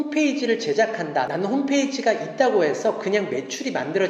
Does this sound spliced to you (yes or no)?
no